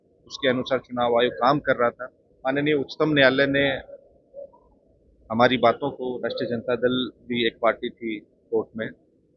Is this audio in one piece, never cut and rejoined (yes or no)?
no